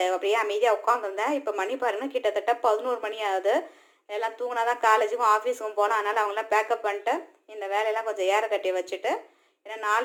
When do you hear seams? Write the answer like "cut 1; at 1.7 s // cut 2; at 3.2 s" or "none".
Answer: none